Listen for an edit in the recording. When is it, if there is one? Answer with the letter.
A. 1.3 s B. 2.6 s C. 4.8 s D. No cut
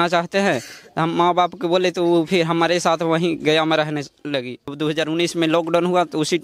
C